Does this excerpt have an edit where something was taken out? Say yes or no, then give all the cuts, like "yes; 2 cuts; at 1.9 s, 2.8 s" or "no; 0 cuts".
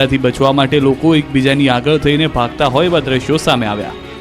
yes; 1 cut; at 1.3 s